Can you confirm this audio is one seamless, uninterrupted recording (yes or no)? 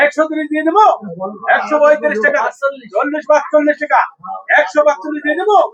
yes